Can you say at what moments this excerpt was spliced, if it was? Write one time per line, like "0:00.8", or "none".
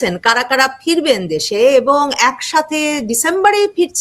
none